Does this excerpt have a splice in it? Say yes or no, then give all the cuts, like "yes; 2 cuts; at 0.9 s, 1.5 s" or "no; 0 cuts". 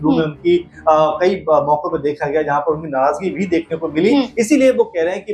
no; 0 cuts